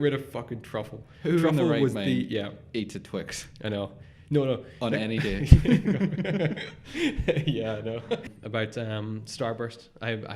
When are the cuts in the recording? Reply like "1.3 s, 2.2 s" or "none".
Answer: 8.3 s

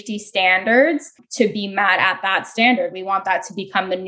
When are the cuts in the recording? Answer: 1.2 s

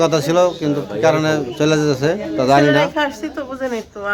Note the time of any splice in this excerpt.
none

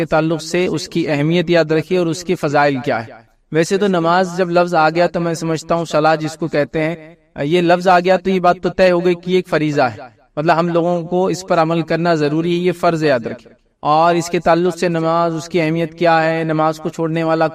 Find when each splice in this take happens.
none

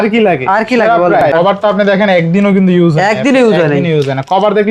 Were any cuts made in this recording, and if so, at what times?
1.3 s

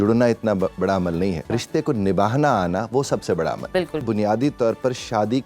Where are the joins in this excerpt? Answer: 1.4 s, 4.0 s

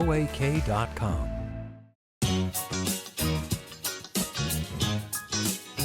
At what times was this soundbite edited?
2.0 s

